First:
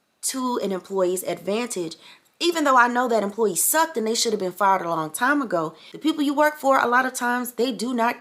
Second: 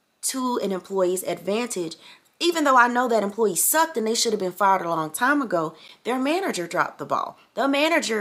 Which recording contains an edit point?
first; 1 cut; at 5.8 s

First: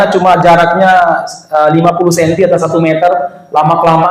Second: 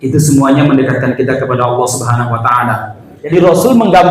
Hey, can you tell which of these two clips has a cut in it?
second; 1 cut; at 3.1 s

